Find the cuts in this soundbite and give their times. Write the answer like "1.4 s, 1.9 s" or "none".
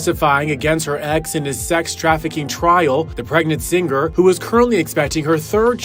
none